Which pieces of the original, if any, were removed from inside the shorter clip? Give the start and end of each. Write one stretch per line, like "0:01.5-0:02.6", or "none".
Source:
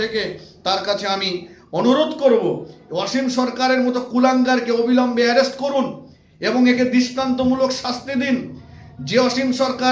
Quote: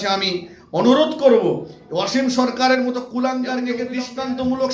0:04.6-0:06.6